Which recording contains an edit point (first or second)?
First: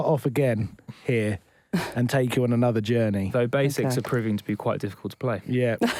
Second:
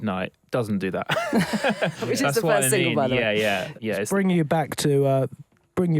second